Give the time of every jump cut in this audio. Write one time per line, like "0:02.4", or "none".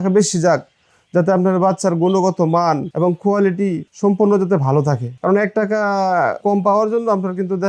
0:02.8
0:03.9
0:05.1
0:06.4